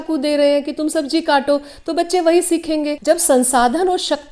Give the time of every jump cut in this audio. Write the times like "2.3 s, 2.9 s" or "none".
3.0 s

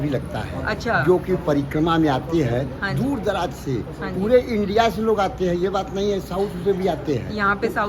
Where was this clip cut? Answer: none

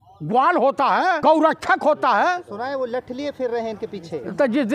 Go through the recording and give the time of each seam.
1.2 s

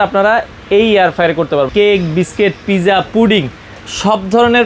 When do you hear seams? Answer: 1.7 s

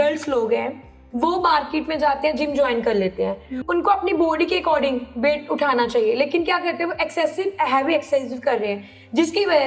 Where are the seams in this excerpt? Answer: none

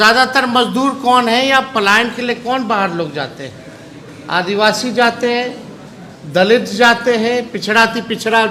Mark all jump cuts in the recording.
none

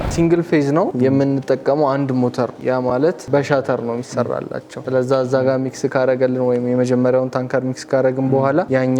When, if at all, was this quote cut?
0.9 s

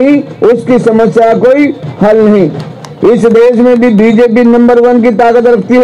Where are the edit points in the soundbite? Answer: none

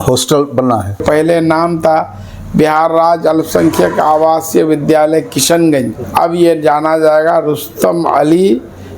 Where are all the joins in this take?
1.0 s, 6.0 s

